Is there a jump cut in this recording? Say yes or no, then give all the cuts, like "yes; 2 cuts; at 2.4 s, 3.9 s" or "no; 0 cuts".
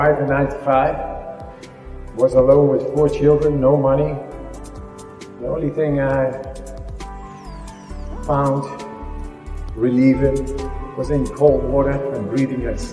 no; 0 cuts